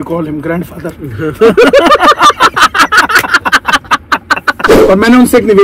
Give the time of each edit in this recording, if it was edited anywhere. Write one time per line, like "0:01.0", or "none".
0:04.7